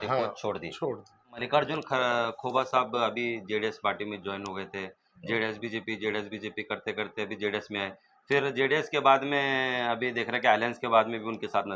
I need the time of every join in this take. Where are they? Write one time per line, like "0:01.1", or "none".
0:01.4

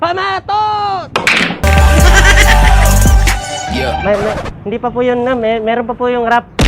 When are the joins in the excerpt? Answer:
none

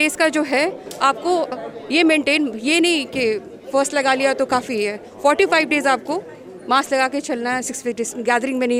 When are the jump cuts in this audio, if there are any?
none

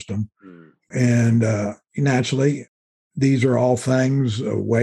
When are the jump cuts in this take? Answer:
0:00.9

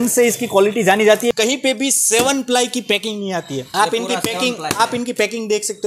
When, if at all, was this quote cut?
0:01.3
0:03.7

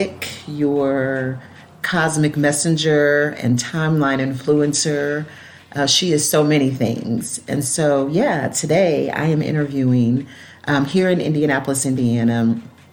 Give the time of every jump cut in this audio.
none

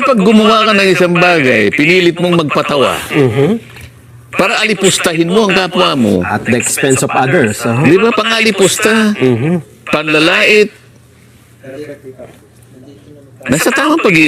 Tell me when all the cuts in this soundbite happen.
none

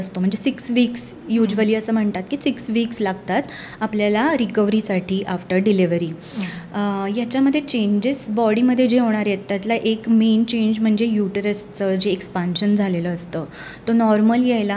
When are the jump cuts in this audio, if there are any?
none

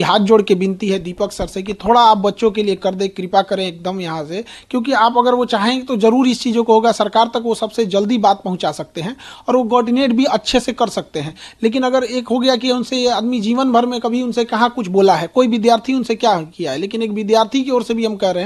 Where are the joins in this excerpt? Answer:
none

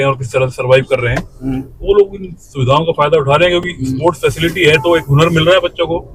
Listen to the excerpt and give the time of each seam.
none

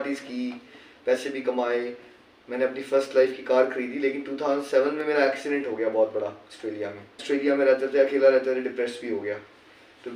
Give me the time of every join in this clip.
0:07.2

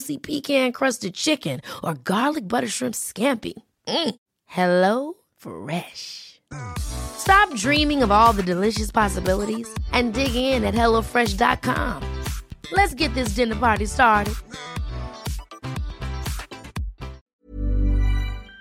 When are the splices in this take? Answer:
0:17.2

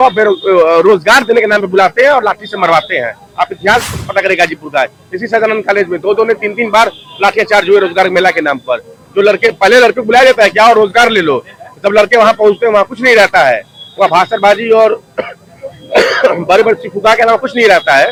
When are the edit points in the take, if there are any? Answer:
none

